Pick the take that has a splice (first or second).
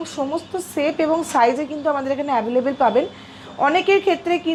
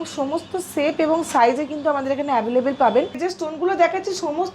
second